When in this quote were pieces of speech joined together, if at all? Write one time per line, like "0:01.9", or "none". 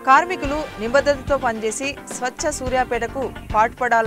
none